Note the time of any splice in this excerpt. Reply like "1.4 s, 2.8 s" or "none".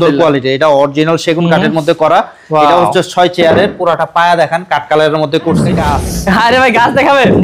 5.9 s